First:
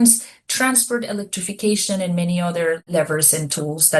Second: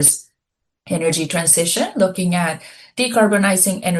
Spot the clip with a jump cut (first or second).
first